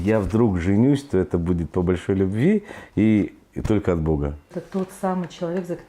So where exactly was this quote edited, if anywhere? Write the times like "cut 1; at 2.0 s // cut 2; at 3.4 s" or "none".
cut 1; at 4.6 s